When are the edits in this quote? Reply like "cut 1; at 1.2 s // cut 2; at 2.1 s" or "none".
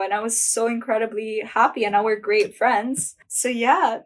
none

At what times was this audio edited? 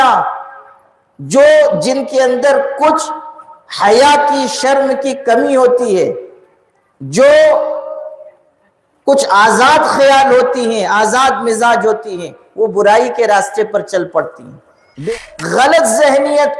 cut 1; at 15.0 s

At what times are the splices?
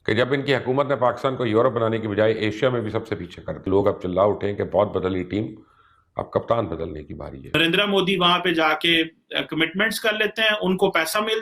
cut 1; at 3.6 s // cut 2; at 7.5 s

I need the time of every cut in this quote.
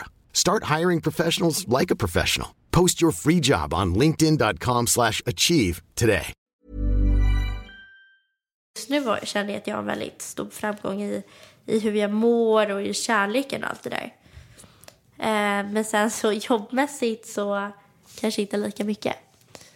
cut 1; at 6.4 s // cut 2; at 8.8 s

